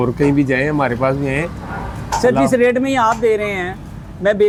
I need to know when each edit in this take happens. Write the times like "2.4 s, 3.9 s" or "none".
none